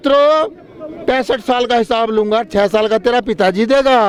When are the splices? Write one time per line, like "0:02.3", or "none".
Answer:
none

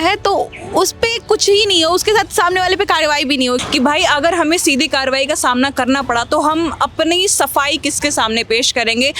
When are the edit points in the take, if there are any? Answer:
0:03.6

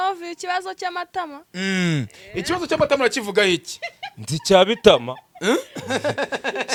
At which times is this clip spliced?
none

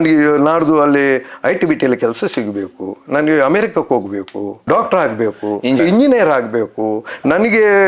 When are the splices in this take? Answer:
0:04.5
0:05.8

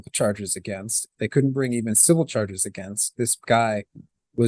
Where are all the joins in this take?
none

